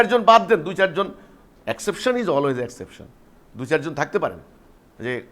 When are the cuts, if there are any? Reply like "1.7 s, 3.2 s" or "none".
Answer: none